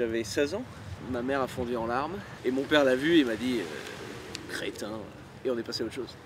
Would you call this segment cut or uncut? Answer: cut